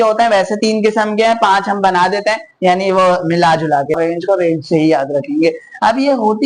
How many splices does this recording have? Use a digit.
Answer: 1